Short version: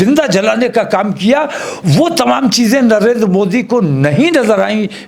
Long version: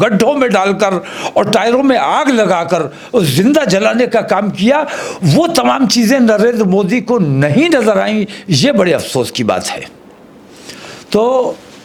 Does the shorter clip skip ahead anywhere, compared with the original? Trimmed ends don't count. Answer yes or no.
no